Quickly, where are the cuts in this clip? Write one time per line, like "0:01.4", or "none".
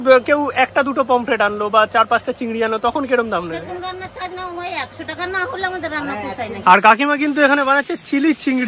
0:06.6